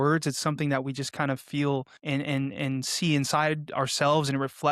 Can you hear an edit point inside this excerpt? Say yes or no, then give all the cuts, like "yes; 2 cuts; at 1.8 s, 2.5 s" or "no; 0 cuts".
yes; 1 cut; at 1.9 s